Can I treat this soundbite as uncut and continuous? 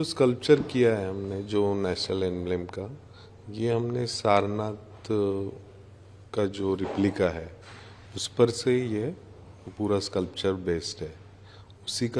yes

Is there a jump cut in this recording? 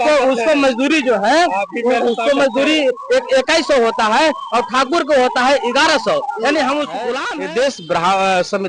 yes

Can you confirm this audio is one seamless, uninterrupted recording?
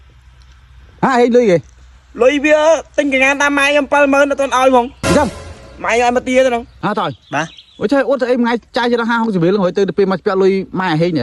yes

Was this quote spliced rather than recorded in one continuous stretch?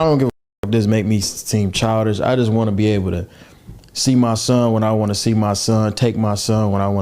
yes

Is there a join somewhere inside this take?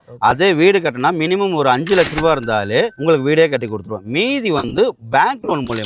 no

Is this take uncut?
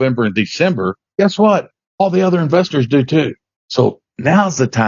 no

